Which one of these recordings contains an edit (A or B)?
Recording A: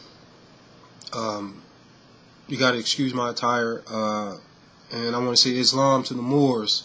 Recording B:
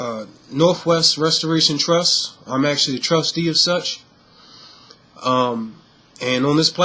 B